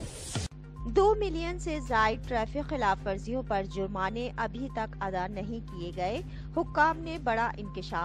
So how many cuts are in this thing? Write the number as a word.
zero